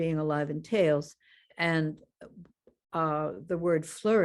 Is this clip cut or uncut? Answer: uncut